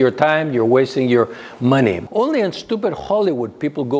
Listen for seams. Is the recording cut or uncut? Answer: cut